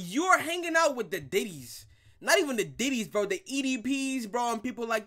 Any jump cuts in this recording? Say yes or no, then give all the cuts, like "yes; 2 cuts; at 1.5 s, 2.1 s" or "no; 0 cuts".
no; 0 cuts